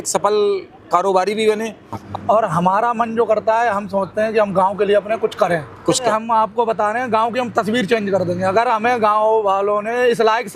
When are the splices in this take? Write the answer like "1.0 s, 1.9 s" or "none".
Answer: 1.9 s, 6.0 s